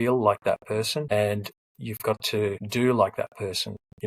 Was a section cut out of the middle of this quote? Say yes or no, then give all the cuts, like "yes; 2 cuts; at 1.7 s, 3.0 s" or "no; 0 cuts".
yes; 2 cuts; at 1.1 s, 2.6 s